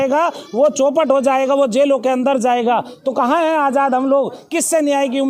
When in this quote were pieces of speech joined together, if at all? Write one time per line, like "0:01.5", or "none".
none